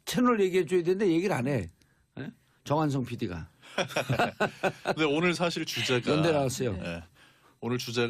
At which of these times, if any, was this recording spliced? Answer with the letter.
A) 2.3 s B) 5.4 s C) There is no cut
B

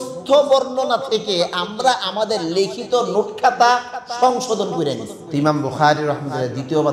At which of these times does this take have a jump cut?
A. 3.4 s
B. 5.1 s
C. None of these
B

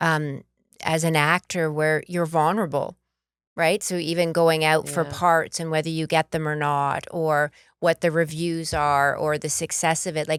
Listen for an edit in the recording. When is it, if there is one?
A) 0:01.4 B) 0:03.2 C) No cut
C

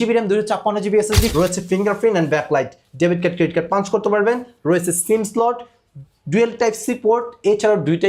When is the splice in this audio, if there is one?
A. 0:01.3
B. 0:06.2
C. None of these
A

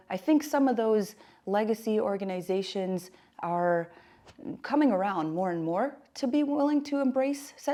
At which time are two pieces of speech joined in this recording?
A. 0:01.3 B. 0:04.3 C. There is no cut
C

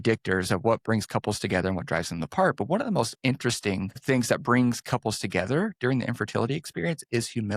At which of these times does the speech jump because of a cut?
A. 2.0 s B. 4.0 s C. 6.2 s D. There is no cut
B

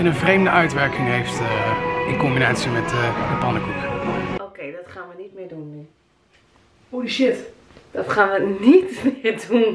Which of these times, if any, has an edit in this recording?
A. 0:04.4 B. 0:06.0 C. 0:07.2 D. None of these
A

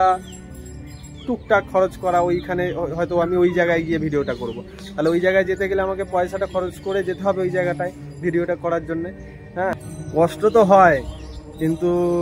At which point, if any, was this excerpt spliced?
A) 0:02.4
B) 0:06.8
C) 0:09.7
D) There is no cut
C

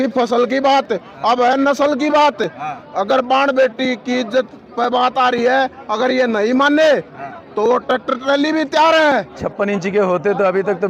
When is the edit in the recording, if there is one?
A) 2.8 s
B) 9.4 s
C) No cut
B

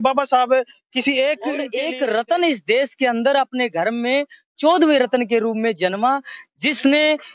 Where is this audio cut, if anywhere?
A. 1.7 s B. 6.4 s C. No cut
A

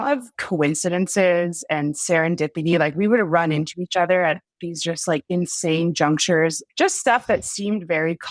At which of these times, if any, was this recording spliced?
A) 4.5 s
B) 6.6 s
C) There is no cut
B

